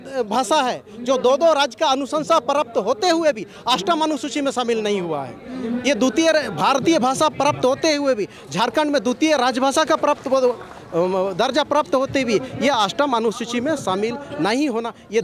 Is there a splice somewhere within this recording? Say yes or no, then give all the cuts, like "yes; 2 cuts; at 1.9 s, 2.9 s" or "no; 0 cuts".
no; 0 cuts